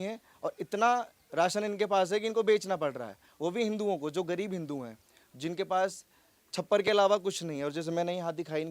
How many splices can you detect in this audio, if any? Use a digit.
0